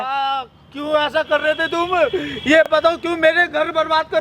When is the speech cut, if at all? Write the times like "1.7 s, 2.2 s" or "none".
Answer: none